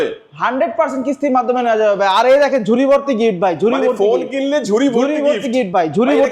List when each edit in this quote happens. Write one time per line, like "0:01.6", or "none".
none